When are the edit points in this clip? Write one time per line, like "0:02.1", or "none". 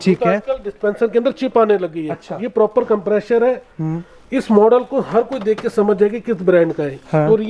none